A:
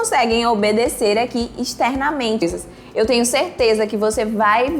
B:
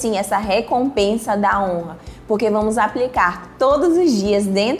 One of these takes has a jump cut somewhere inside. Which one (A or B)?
A